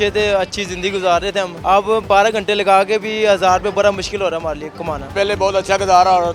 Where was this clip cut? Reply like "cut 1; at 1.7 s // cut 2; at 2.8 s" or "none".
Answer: cut 1; at 1.5 s // cut 2; at 5.1 s